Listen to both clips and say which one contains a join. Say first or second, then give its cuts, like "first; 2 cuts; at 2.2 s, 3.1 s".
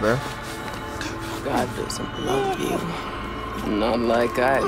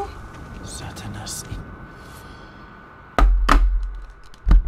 second; 1 cut; at 3.1 s